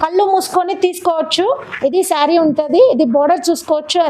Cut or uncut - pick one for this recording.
cut